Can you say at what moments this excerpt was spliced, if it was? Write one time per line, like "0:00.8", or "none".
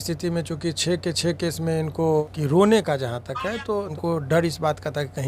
0:02.2
0:03.9